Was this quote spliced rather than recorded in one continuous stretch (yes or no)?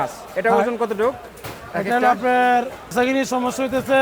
yes